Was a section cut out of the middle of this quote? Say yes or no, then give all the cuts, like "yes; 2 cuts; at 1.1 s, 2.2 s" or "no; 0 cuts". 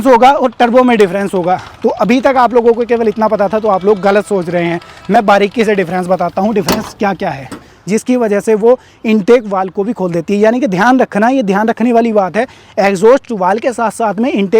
yes; 1 cut; at 7.7 s